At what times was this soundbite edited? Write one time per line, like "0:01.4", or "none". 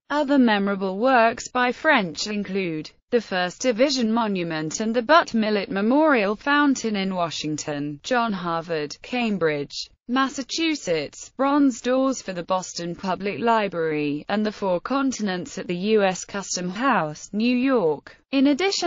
0:14.8